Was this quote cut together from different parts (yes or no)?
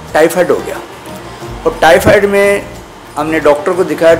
no